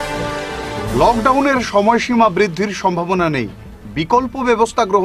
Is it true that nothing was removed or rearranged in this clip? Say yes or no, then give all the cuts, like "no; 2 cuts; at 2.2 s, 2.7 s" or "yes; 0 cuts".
no; 1 cut; at 0.9 s